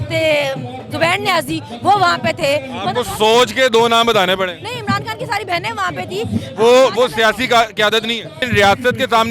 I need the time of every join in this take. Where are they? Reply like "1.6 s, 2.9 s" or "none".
8.4 s